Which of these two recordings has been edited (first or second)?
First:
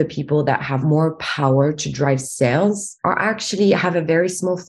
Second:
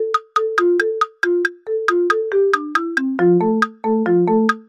first